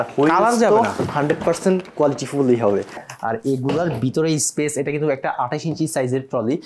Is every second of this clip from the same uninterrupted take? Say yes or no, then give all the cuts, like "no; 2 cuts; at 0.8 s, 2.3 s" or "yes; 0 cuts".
yes; 0 cuts